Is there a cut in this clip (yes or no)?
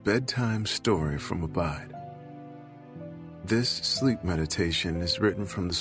yes